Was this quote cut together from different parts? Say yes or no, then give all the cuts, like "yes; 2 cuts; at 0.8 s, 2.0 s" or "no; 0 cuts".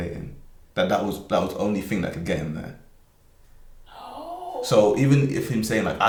no; 0 cuts